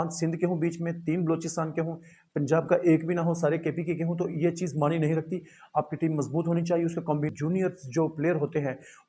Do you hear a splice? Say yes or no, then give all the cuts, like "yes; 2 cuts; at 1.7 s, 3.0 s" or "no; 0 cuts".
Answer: yes; 1 cut; at 7.3 s